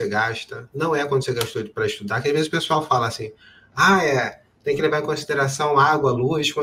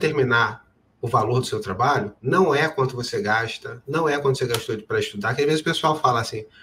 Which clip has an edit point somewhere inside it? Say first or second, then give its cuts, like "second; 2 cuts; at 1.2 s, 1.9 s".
second; 1 cut; at 2.1 s